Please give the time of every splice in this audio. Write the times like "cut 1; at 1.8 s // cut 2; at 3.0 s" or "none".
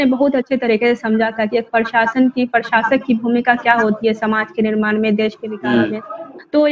none